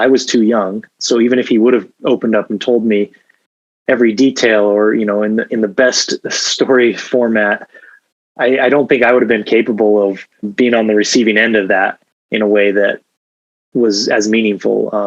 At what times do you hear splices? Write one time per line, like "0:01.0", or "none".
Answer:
0:10.5